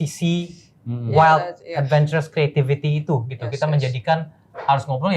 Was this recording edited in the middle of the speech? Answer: no; 0 cuts

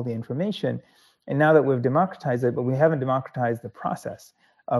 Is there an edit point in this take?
no; 0 cuts

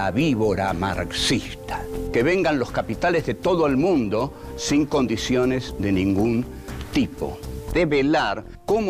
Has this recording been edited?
yes; 1 cut; at 7.4 s

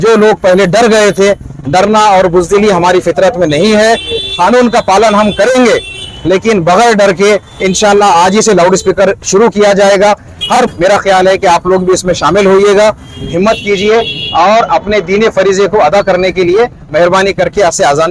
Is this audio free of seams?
no; 1 cut; at 10.5 s

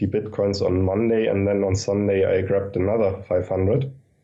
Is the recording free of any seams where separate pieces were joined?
yes; 0 cuts

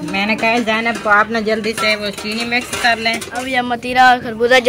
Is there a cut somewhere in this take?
yes; 1 cut; at 3.3 s

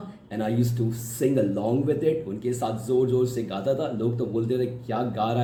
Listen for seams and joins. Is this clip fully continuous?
yes; 0 cuts

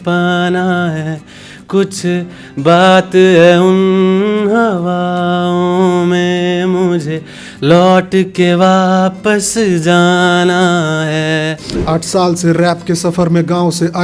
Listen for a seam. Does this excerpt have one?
yes; 1 cut; at 11.7 s

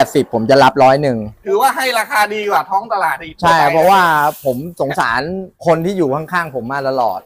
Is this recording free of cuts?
no; 2 cuts; at 1.3 s, 5.5 s

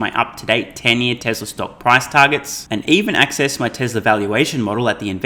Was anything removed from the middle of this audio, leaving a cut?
no; 0 cuts

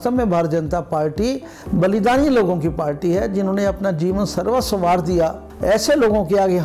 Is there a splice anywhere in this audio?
yes; 2 cuts; at 1.5 s, 5.5 s

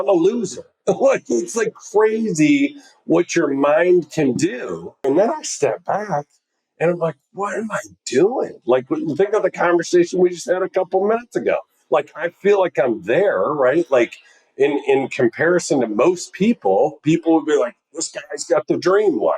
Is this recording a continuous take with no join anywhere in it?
no; 1 cut; at 5.0 s

